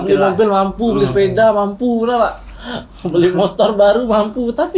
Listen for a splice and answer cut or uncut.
uncut